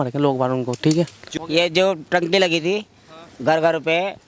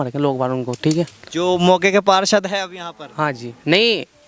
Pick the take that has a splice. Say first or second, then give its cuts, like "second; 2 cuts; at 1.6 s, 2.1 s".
first; 1 cut; at 1.2 s